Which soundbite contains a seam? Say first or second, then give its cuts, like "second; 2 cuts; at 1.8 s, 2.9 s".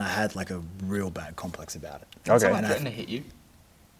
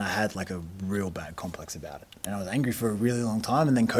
second; 1 cut; at 2.2 s